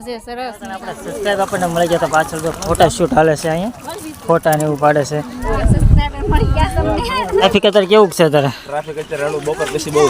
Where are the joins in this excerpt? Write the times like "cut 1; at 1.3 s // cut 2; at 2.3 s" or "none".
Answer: cut 1; at 1.0 s // cut 2; at 5.5 s // cut 3; at 7.4 s